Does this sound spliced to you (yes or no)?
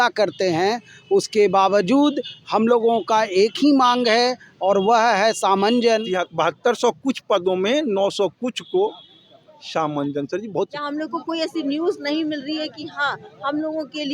yes